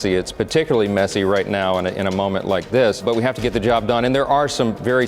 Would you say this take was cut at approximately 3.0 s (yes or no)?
yes